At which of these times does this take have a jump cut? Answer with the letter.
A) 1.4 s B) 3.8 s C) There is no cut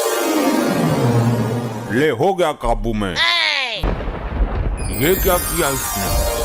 B